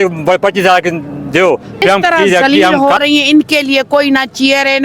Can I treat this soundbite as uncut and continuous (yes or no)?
no